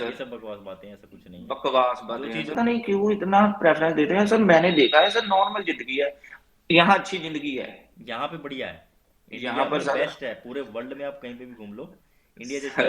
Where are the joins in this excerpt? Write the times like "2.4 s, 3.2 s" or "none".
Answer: 2.6 s